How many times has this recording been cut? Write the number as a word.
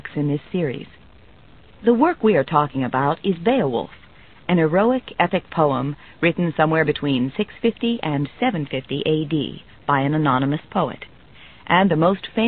one